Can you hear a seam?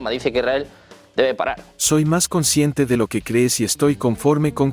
no; 0 cuts

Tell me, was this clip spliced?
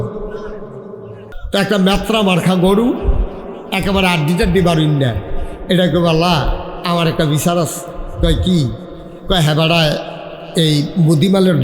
yes; 1 cut; at 1.3 s

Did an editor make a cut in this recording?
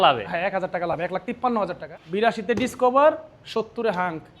yes; 1 cut; at 1.8 s

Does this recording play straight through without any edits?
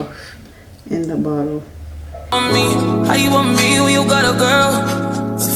yes; 0 cuts

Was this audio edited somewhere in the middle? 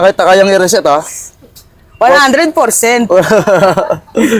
no; 0 cuts

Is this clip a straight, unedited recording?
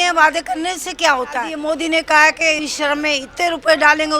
no; 2 cuts; at 1.5 s, 2.6 s

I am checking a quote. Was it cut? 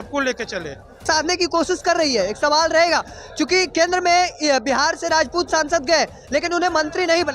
yes; 1 cut; at 1.1 s

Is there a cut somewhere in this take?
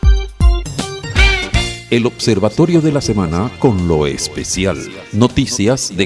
yes; 1 cut; at 1.0 s

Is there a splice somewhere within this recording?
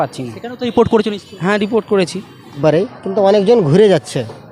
yes; 1 cut; at 2.6 s

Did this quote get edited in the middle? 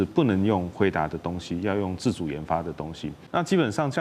yes; 1 cut; at 3.1 s

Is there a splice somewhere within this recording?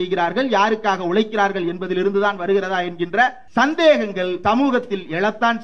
yes; 2 cuts; at 3.4 s, 4.4 s

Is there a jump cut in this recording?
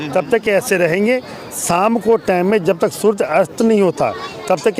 no; 0 cuts

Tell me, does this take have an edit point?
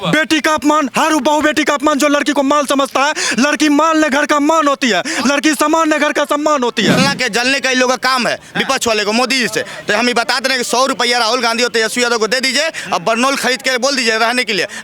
yes; 1 cut; at 7.0 s

